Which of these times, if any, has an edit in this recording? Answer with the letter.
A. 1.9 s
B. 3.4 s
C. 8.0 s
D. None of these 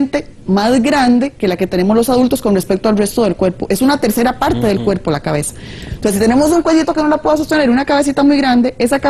B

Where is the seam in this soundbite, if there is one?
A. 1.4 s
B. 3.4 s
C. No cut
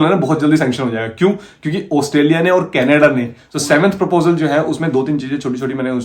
B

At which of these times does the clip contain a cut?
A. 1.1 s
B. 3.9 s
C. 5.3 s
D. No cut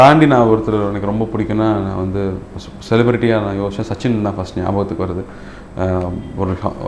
D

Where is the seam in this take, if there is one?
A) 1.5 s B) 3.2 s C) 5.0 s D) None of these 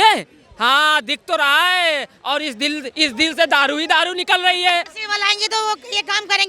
C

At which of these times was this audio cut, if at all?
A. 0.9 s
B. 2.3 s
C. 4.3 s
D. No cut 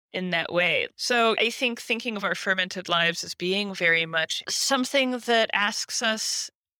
A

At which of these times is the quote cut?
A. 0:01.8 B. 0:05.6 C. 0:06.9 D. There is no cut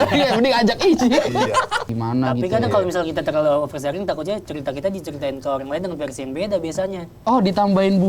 A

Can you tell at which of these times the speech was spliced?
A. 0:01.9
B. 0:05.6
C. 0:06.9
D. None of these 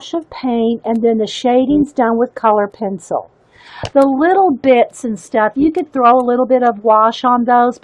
A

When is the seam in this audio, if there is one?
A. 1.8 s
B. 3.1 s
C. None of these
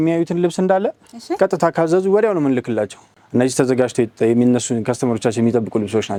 C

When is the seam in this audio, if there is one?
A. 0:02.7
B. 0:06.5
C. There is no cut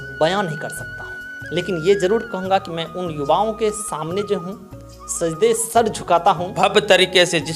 B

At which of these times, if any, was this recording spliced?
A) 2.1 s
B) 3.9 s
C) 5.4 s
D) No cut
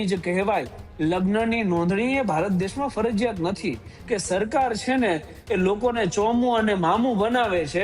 B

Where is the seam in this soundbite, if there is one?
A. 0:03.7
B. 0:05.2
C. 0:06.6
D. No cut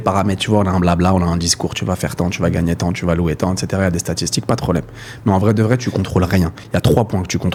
D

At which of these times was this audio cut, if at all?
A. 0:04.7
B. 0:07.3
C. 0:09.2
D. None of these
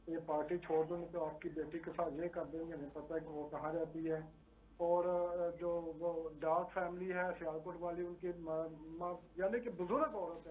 D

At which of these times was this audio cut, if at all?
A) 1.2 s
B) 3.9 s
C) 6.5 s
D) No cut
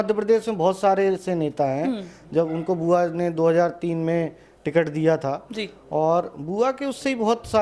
D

